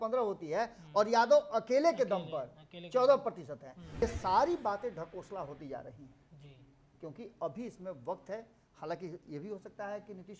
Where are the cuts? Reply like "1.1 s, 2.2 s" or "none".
4.0 s